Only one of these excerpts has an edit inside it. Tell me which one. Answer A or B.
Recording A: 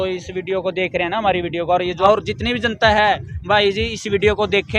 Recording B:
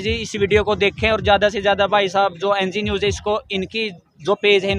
A